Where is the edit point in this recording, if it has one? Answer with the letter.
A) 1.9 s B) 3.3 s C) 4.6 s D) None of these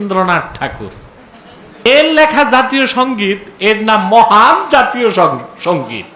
A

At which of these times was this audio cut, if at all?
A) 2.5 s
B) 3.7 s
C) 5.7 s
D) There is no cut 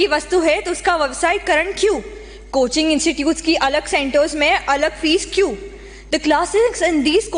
D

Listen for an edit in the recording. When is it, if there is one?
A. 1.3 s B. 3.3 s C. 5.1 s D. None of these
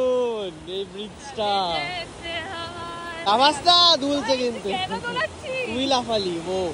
B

